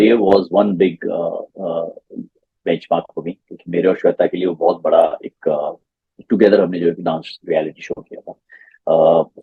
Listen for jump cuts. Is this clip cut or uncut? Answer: uncut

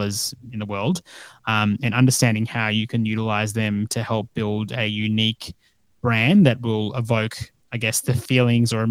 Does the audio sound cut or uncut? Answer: uncut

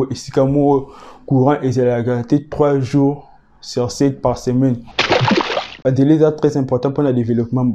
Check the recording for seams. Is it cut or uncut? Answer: cut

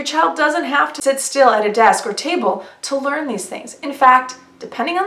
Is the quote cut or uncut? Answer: cut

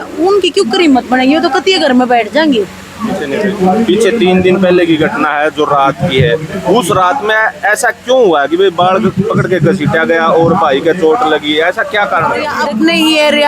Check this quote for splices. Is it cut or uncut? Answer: cut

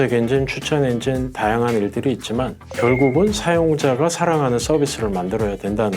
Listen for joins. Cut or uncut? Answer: cut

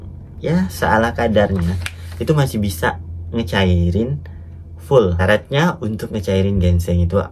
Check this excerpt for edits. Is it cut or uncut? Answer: cut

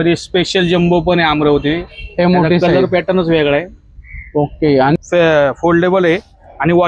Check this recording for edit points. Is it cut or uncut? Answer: cut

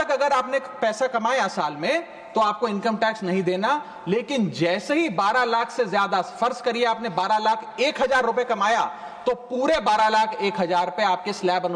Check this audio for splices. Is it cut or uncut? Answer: uncut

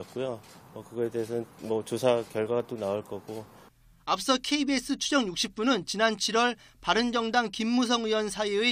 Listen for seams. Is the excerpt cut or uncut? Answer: cut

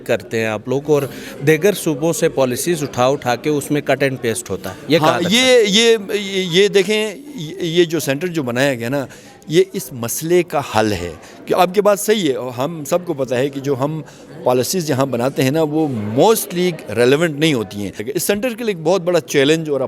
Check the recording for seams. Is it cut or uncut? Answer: cut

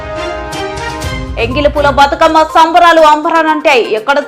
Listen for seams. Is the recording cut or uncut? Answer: cut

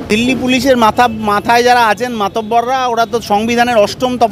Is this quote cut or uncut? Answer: uncut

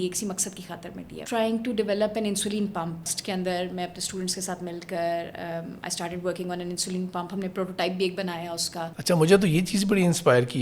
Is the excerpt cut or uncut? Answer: cut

